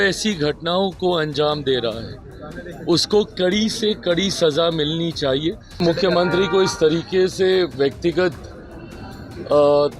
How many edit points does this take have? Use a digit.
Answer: 1